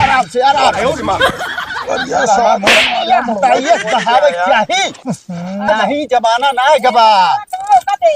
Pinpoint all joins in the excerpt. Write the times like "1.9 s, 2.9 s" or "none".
5.7 s